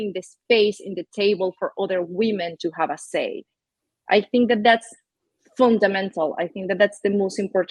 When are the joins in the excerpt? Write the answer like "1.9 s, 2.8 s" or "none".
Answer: none

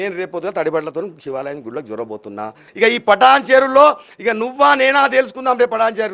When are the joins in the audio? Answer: 2.6 s

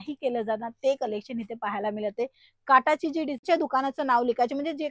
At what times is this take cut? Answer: 3.4 s

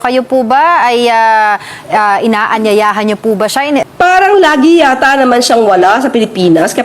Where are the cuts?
3.8 s

